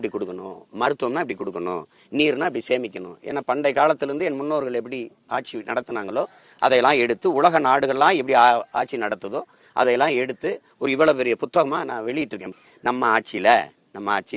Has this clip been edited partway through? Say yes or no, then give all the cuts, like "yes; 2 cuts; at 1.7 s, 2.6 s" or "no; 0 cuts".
yes; 1 cut; at 12.5 s